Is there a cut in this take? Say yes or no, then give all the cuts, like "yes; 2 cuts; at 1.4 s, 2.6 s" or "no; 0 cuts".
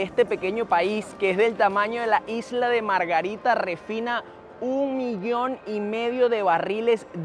no; 0 cuts